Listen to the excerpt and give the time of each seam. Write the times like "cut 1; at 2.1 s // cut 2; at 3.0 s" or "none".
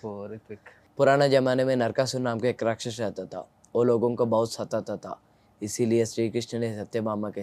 none